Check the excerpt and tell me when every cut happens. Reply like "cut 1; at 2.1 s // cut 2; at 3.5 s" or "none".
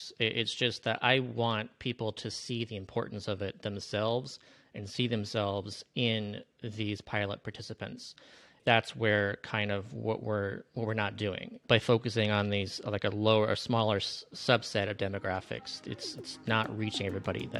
cut 1; at 8.6 s // cut 2; at 11.6 s